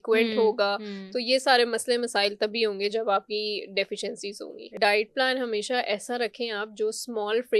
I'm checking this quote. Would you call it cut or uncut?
cut